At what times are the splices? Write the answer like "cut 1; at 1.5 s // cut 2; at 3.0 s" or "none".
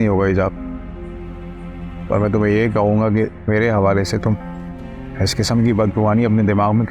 none